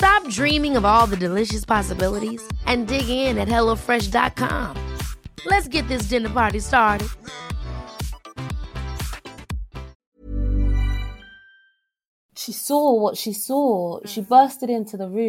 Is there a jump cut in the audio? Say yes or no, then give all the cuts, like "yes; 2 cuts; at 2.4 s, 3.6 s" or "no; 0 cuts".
yes; 1 cut; at 12.3 s